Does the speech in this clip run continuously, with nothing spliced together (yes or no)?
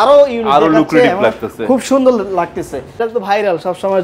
no